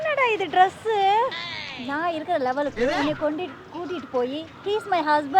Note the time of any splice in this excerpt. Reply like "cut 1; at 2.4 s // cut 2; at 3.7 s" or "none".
cut 1; at 1.5 s